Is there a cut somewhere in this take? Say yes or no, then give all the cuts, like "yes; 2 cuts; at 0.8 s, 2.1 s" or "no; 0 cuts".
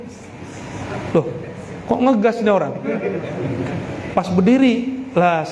no; 0 cuts